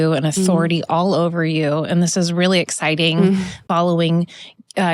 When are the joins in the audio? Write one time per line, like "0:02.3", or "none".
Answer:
0:03.6